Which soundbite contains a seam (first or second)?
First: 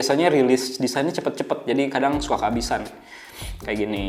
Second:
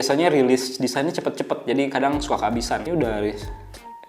second